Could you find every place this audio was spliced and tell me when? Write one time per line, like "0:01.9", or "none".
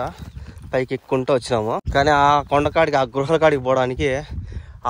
0:01.8